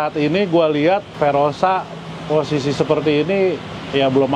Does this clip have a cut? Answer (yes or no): yes